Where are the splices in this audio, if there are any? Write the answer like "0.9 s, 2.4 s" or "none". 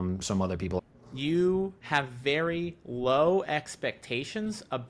0.8 s, 1.8 s